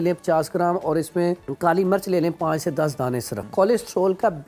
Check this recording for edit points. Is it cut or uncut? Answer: cut